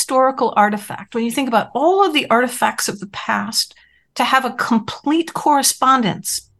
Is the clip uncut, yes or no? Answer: yes